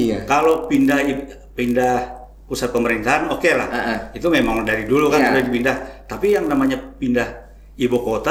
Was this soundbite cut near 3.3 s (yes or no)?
no